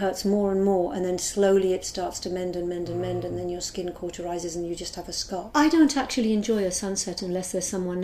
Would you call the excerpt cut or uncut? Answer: cut